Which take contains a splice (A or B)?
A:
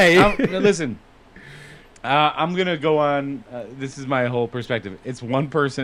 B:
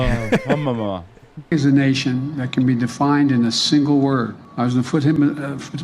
B